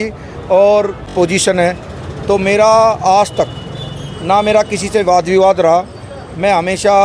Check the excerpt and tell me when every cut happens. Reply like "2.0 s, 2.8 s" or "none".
1.0 s